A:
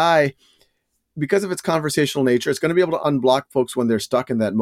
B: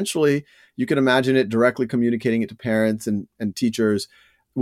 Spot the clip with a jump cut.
A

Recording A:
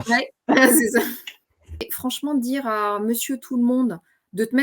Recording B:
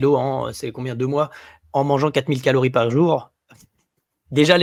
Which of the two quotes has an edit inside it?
A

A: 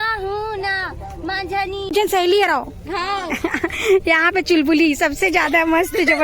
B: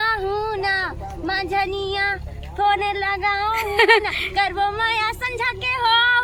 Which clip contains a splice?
A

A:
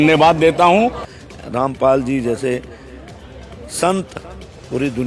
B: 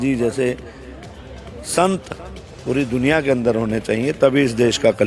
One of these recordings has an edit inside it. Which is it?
A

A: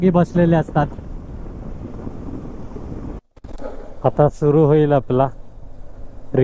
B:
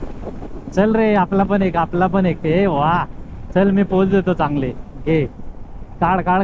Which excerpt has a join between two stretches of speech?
A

